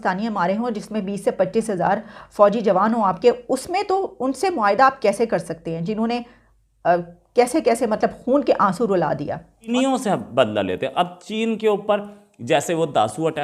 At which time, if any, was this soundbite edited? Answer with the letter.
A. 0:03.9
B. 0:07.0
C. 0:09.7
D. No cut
C